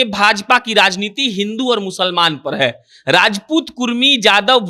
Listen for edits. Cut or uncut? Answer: uncut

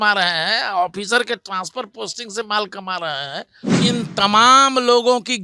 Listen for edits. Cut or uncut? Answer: cut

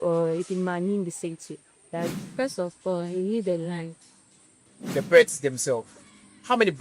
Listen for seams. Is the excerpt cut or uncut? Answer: cut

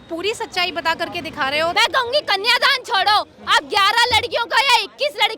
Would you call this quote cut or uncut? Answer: cut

